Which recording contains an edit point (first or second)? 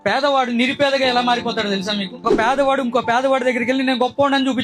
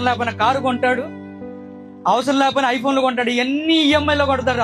first